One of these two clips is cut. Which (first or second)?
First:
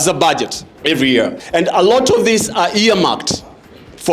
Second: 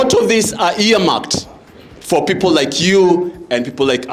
first